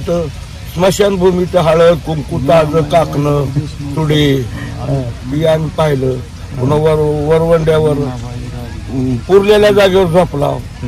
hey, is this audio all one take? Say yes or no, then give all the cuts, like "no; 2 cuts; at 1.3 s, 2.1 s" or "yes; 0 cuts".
yes; 0 cuts